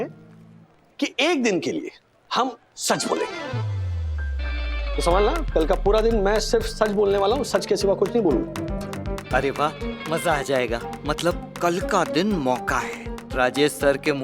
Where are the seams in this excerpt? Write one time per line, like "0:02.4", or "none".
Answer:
0:08.5